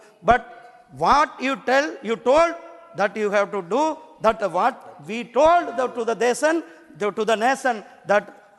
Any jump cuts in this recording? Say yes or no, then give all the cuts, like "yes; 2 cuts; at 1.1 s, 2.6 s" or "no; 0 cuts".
no; 0 cuts